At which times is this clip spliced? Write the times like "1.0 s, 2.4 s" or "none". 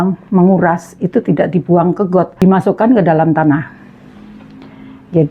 2.3 s